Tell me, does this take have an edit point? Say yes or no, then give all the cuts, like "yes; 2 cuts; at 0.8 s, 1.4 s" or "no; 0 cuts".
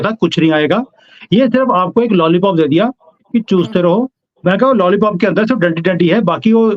no; 0 cuts